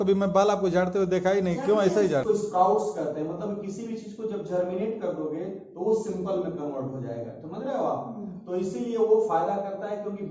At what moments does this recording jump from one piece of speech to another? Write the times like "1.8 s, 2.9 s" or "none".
2.2 s

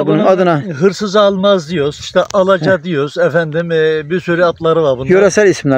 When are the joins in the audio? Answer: none

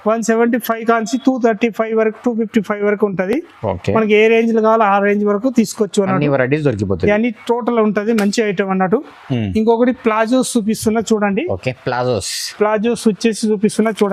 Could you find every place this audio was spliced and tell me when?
none

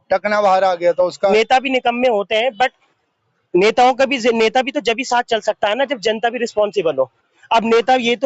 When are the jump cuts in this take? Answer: 1.1 s

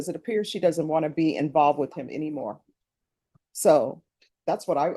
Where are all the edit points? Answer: none

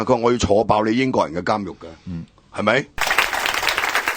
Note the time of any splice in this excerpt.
2.9 s

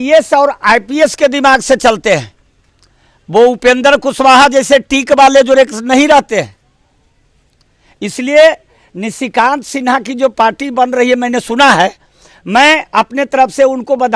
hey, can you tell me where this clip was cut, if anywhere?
none

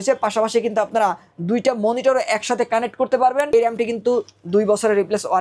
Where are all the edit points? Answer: 3.5 s

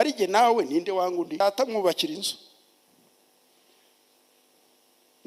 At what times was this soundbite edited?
1.4 s

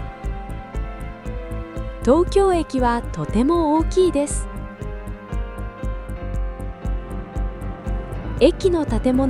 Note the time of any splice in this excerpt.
2.0 s, 4.3 s, 8.4 s

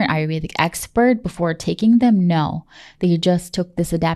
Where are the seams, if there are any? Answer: none

